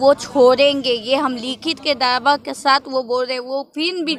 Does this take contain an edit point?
no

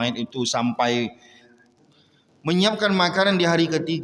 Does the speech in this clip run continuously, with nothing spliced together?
no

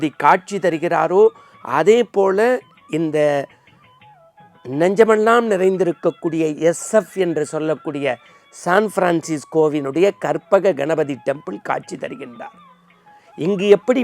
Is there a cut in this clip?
no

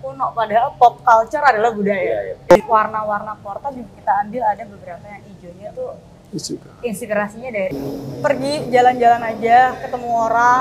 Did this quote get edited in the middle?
yes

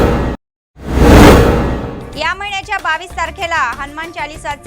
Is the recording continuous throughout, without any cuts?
yes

